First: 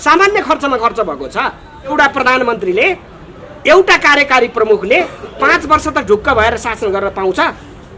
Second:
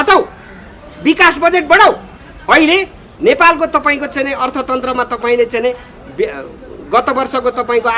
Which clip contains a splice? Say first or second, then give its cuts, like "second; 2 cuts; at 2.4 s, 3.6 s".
first; 1 cut; at 1.9 s